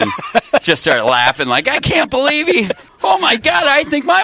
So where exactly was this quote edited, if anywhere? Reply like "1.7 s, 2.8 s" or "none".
2.9 s